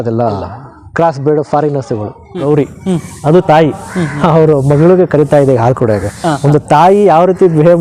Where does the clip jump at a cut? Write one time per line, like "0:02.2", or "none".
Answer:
0:02.4